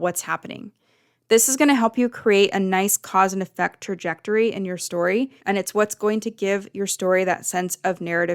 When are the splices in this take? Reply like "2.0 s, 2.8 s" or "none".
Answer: 5.4 s

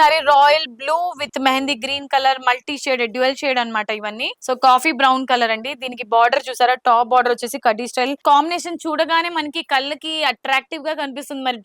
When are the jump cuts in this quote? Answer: 4.4 s, 8.2 s

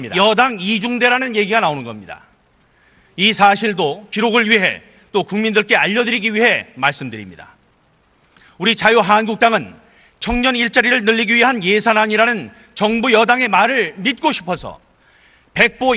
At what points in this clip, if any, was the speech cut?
12.1 s

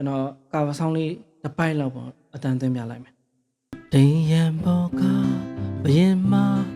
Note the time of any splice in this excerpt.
3.8 s

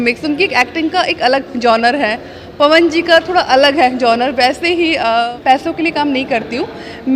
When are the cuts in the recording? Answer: 5.3 s

